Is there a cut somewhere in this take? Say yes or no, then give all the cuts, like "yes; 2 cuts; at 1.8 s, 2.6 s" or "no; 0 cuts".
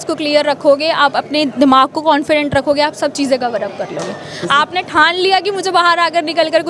no; 0 cuts